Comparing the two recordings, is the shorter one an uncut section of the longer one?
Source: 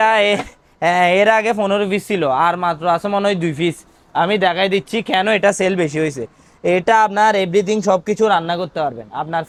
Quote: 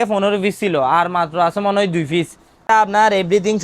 no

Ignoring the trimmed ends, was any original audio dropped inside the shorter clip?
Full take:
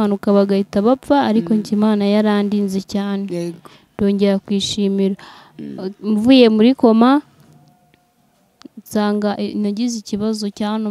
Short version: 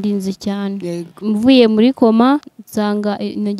yes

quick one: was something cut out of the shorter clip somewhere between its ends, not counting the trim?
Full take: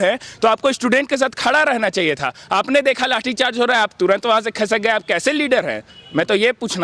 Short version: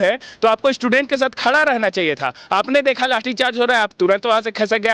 no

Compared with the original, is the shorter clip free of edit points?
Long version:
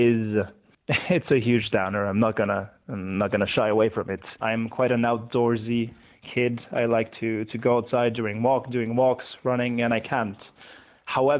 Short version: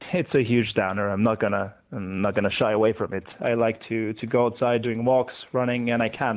no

